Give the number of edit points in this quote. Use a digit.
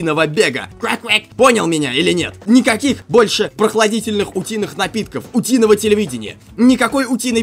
3